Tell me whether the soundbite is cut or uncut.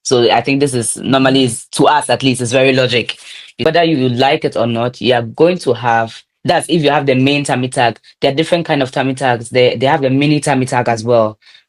cut